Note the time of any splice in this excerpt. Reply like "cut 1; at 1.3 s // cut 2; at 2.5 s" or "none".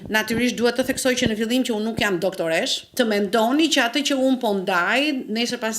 cut 1; at 2.9 s